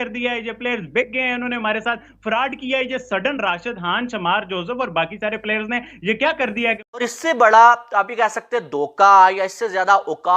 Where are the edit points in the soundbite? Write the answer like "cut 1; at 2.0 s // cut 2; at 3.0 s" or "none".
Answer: cut 1; at 6.8 s